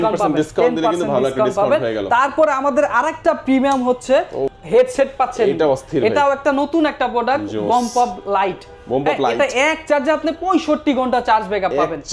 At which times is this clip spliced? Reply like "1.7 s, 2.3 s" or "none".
none